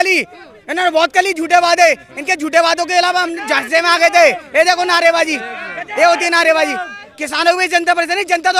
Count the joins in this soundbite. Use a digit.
0